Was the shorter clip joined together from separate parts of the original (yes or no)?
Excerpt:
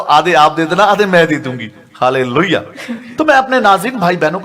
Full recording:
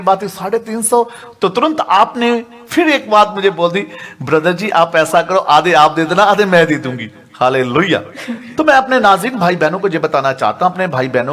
no